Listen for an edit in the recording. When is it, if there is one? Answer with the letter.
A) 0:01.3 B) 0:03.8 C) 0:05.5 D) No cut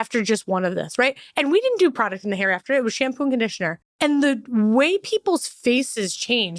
B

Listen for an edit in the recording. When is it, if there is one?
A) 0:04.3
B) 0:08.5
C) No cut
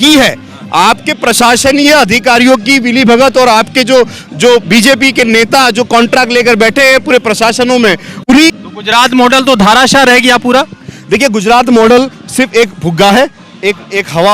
B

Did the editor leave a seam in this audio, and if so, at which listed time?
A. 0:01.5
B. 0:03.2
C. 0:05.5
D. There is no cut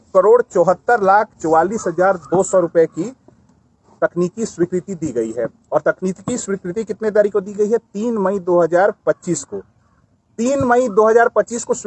D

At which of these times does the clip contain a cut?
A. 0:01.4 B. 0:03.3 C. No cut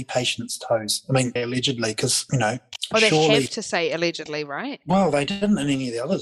A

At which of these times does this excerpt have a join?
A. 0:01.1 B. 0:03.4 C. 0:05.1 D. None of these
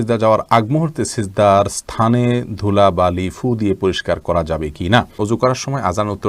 C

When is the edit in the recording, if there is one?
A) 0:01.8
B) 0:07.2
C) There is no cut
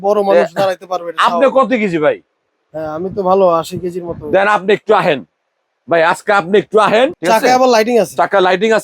B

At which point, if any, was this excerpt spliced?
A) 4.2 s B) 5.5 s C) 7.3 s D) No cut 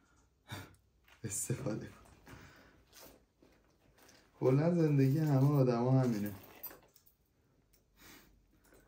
D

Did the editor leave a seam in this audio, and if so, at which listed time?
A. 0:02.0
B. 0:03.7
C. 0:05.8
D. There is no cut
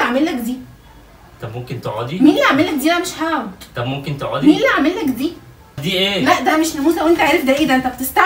C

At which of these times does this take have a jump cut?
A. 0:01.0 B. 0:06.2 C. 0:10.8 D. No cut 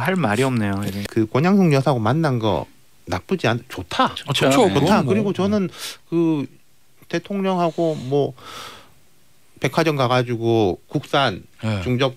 A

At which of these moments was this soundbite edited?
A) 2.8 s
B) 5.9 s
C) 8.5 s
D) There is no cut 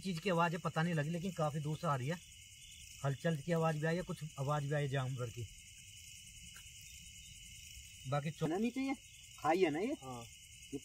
C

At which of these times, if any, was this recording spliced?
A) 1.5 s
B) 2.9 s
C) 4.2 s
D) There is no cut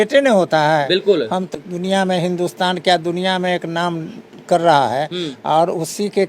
A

